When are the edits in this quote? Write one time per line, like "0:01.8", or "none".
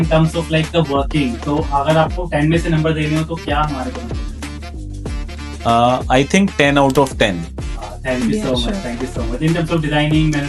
none